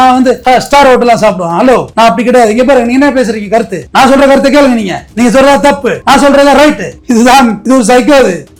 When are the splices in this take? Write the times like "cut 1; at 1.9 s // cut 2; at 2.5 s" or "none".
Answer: none